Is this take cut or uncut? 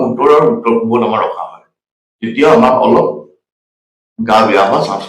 uncut